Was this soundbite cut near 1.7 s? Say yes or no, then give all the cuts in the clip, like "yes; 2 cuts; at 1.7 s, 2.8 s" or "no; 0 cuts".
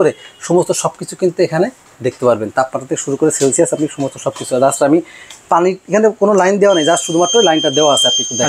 no; 0 cuts